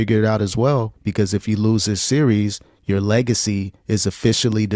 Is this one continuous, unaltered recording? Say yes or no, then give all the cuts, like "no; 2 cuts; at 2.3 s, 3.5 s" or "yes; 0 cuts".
no; 1 cut; at 1.0 s